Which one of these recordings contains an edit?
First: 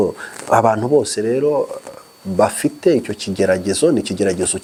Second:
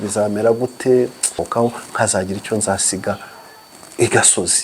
second; 1 cut; at 1.4 s

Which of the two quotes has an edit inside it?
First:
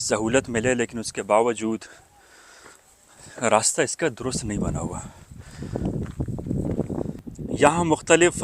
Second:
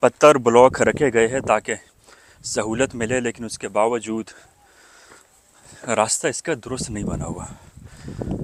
first; 1 cut; at 7.2 s

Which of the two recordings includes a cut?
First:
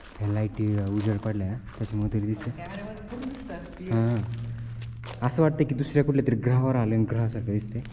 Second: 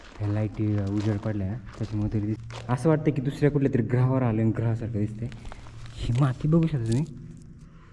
second; 1 cut; at 2.5 s

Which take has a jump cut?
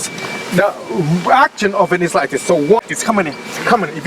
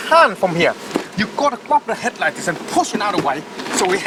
first; 1 cut; at 2.9 s

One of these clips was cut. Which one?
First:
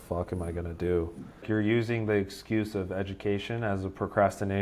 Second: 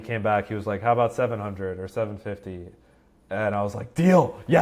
first; 1 cut; at 1.3 s

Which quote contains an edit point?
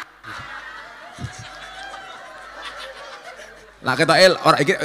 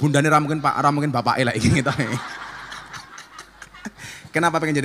first; 1 cut; at 3.9 s

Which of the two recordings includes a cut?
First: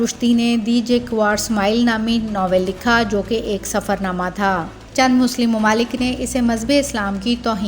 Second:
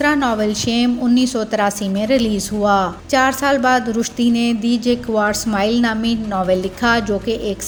first; 1 cut; at 4.8 s

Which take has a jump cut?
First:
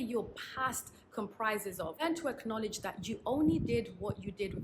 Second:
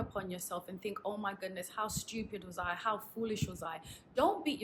first; 1 cut; at 2.0 s

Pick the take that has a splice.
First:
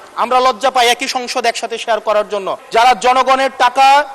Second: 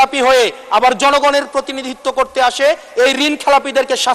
first; 1 cut; at 2.5 s

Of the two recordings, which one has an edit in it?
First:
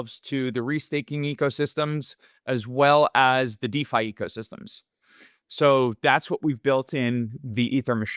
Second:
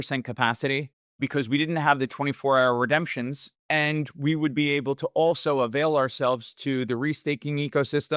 second; 2 cuts; at 1.0 s, 3.5 s

